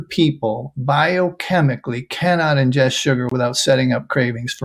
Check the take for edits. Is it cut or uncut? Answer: uncut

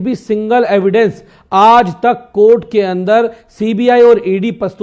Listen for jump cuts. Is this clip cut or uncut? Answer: uncut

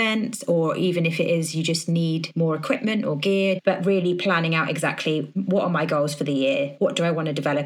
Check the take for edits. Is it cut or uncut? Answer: cut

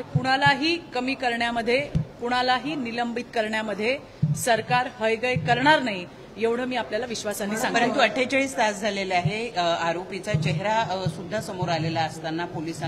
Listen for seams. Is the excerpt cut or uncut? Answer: uncut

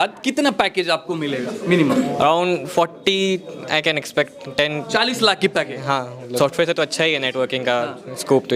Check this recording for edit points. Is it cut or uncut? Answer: uncut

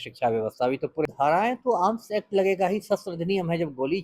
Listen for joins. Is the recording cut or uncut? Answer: cut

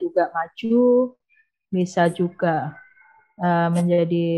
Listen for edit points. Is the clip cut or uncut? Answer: uncut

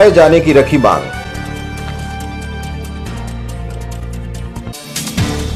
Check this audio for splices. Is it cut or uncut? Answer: uncut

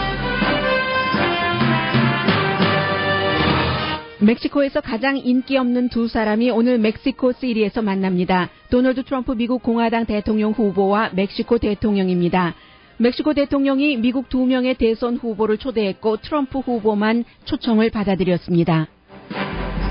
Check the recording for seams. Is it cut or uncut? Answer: uncut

